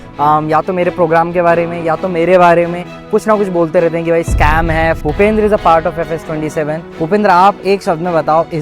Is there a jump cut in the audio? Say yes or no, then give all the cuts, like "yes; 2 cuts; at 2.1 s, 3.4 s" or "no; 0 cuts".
yes; 2 cuts; at 5.0 s, 6.9 s